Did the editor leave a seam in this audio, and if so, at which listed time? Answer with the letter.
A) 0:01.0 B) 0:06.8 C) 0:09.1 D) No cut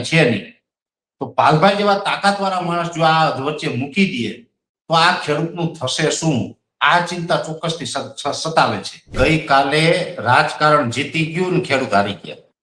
C